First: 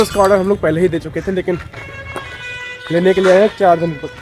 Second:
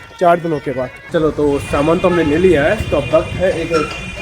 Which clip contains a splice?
second; 1 cut; at 1.0 s

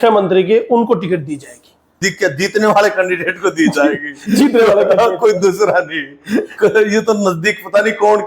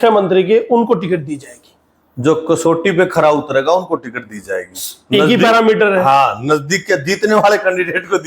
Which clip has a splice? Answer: first; 1 cut; at 2.0 s

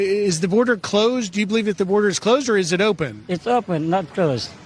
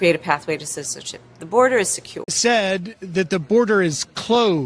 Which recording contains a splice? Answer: second; 1 cut; at 2.3 s

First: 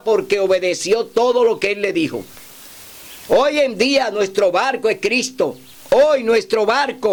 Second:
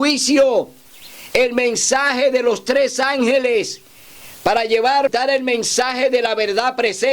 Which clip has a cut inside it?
second; 1 cut; at 5.1 s

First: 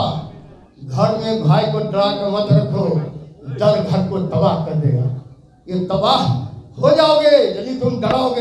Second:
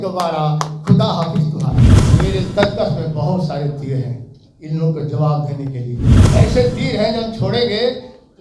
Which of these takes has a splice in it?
second; 2 cuts; at 2.0 s, 6.1 s

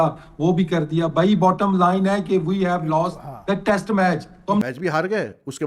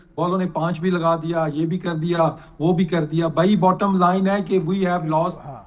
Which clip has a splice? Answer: first; 1 cut; at 4.7 s

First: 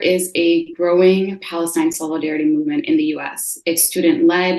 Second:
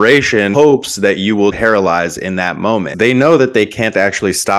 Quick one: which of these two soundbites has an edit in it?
second; 2 cuts; at 1.5 s, 2.9 s

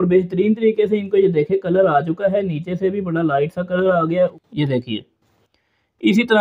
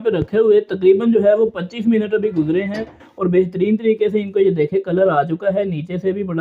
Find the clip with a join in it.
first; 1 cut; at 4.4 s

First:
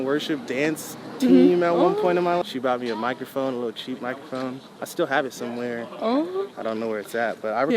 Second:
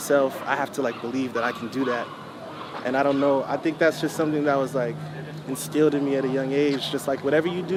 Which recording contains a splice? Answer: first; 1 cut; at 2.4 s

